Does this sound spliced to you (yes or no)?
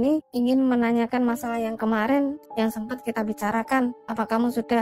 no